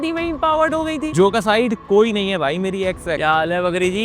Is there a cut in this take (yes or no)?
yes